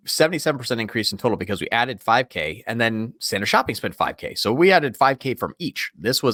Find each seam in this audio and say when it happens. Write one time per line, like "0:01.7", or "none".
none